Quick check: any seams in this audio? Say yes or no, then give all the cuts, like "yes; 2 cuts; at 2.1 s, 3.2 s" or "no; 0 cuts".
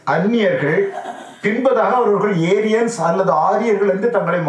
no; 0 cuts